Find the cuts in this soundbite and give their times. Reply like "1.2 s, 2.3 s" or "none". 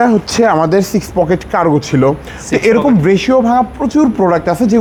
none